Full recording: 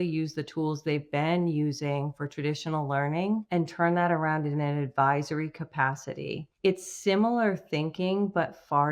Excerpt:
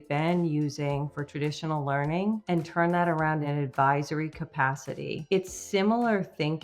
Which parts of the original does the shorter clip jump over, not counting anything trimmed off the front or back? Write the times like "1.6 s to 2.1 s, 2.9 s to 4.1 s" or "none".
4.5 s to 4.7 s, 6.4 s to 6.5 s

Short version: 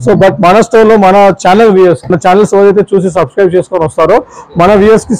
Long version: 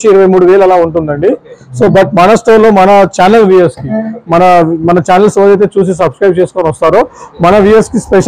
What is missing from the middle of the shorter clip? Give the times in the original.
3.8 s to 4.9 s

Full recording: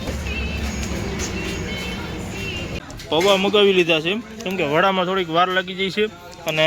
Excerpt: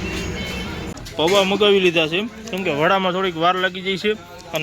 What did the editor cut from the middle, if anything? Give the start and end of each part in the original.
2.3 s to 2.9 s

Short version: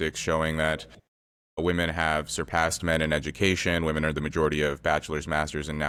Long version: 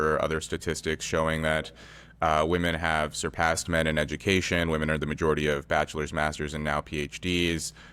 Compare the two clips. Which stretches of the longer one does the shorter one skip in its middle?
none

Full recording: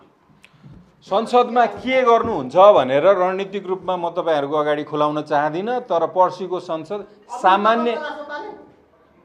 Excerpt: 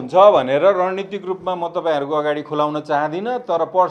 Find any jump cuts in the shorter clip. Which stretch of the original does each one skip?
none

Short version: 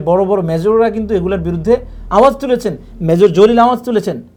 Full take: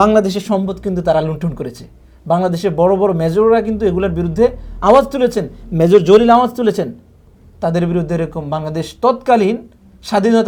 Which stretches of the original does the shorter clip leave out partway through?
none

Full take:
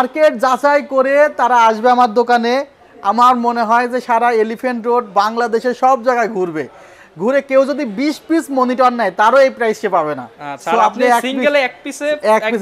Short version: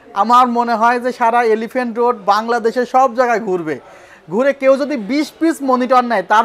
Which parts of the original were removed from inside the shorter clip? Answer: none

